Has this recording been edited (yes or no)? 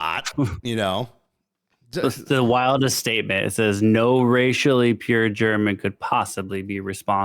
no